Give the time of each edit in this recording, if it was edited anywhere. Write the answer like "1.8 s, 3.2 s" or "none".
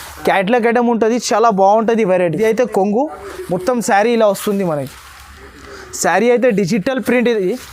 2.4 s